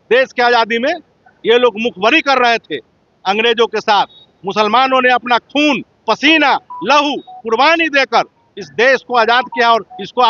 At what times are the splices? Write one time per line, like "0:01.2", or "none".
none